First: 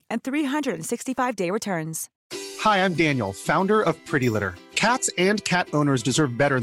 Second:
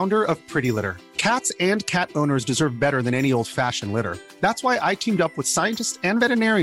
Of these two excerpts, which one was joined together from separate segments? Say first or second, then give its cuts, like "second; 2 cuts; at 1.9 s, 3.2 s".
first; 1 cut; at 2.2 s